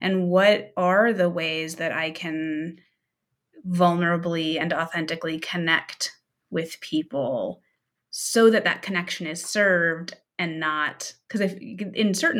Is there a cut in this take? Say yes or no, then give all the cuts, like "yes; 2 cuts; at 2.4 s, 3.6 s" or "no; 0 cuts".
no; 0 cuts